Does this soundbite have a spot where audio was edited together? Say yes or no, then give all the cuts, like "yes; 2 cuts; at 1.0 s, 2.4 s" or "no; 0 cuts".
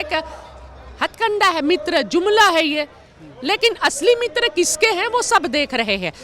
no; 0 cuts